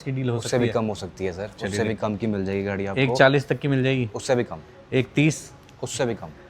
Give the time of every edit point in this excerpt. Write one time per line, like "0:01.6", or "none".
none